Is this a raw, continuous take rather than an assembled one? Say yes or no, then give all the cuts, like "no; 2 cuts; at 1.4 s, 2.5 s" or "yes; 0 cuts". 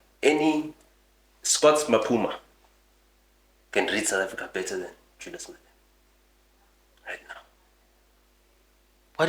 yes; 0 cuts